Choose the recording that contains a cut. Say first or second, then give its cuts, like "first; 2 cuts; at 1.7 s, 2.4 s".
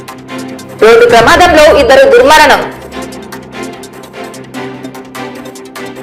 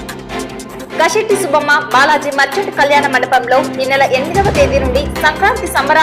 second; 1 cut; at 1.0 s